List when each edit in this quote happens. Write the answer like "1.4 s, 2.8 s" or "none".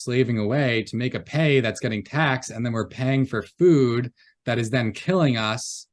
none